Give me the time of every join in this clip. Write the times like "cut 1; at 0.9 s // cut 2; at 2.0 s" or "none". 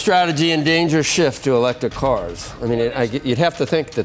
none